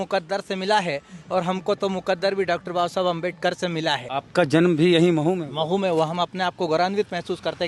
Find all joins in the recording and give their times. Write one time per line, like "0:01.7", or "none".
0:04.1